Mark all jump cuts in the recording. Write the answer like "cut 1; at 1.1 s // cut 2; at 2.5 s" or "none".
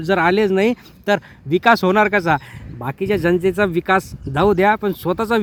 none